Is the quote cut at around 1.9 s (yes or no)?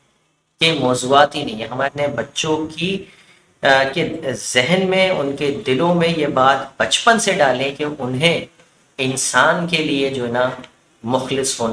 yes